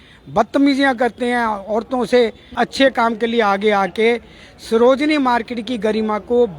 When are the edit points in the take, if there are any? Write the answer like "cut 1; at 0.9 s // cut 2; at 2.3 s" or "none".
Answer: cut 1; at 2.4 s